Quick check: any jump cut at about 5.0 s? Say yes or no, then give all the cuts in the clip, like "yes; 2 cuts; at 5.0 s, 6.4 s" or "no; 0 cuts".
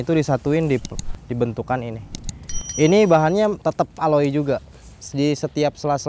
yes; 1 cut; at 5.0 s